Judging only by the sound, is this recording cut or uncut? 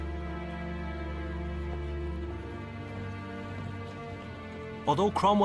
cut